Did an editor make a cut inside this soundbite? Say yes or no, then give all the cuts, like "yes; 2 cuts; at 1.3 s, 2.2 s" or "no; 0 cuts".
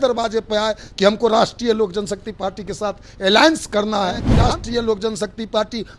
yes; 1 cut; at 4.3 s